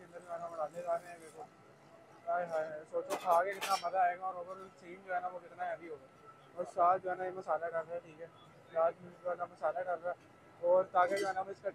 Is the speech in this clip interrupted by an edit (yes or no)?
no